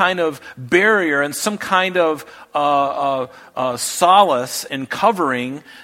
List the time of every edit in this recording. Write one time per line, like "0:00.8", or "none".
0:04.7